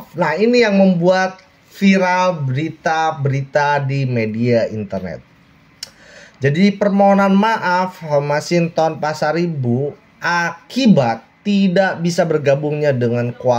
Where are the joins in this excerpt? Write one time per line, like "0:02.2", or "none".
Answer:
none